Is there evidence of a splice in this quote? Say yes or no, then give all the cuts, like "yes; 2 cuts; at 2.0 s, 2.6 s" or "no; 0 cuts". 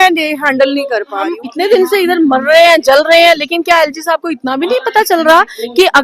yes; 1 cut; at 1.4 s